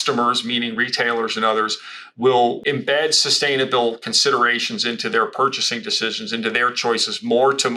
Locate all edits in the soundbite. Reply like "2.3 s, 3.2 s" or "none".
2.6 s